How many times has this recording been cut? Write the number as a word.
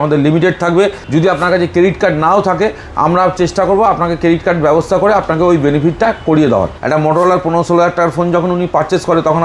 two